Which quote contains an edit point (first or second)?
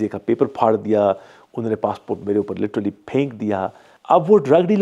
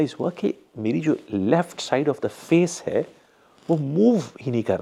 first